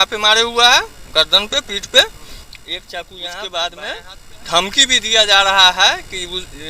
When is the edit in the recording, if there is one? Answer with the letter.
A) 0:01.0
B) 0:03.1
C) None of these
B